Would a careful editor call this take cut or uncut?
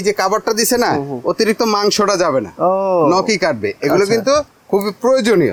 uncut